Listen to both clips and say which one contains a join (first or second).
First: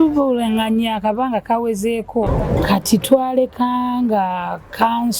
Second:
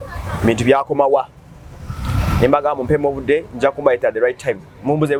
first